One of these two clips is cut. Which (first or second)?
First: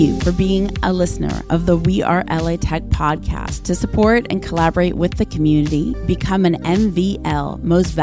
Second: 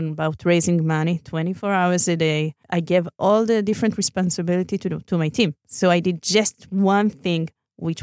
second